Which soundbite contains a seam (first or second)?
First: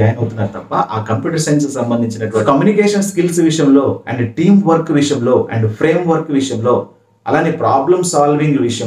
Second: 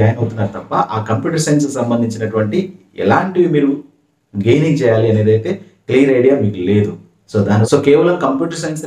first